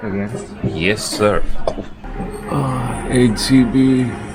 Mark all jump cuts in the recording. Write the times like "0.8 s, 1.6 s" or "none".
2.0 s